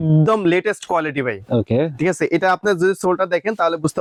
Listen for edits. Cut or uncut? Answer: uncut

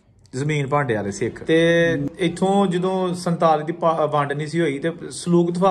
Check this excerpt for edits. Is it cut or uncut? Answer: cut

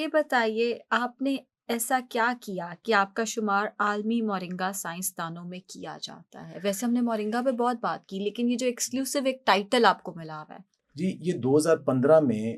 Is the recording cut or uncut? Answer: uncut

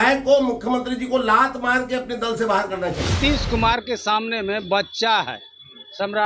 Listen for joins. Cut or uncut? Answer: cut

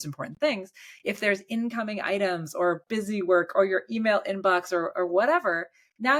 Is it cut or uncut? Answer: uncut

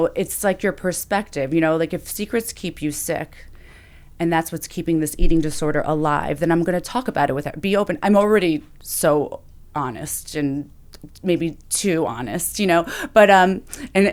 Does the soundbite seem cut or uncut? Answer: uncut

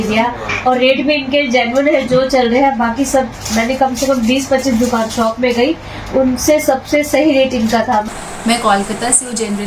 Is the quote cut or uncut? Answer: cut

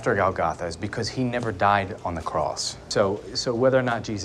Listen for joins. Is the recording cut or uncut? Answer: cut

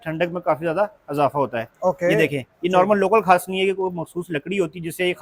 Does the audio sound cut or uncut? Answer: uncut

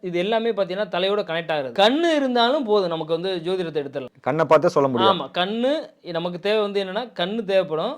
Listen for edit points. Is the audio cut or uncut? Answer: cut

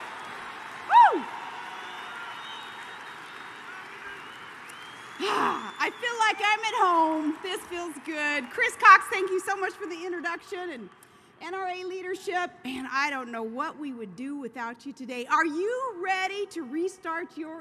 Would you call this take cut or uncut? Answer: cut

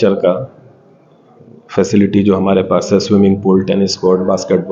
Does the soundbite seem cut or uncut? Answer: uncut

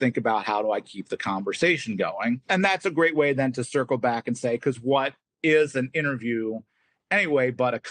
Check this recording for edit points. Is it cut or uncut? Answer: cut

